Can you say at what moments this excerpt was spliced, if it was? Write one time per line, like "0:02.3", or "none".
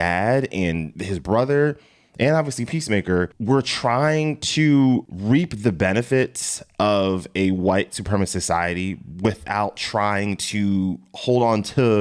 0:00.9
0:03.4
0:05.1